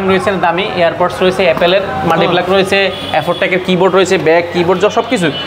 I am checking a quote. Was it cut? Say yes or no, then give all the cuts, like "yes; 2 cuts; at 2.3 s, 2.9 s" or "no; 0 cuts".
no; 0 cuts